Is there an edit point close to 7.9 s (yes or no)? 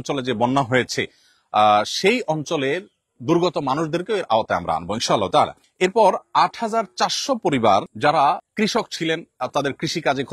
yes